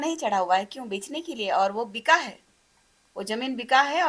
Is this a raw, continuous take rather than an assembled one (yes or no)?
yes